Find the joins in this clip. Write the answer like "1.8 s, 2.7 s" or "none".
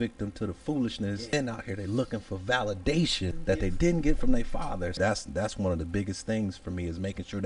1.3 s, 3.3 s, 4.9 s